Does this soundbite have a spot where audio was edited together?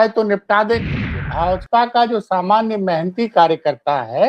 yes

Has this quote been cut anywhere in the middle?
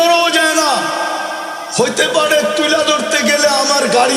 no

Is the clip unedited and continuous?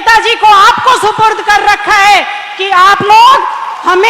yes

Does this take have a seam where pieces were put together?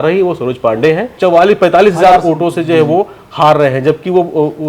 yes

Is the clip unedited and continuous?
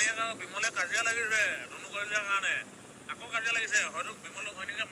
yes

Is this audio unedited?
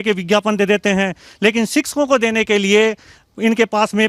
yes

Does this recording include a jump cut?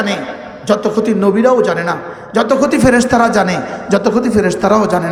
no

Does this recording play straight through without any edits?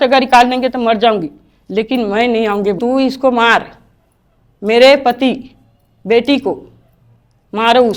no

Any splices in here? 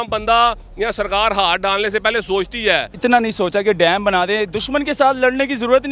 yes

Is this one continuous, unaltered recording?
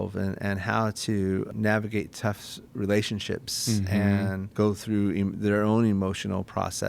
no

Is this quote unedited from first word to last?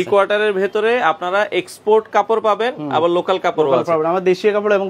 yes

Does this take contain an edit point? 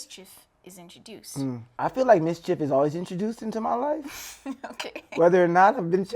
yes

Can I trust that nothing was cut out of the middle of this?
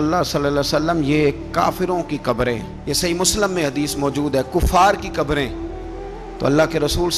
yes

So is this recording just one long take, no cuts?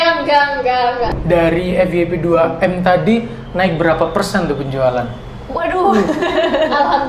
no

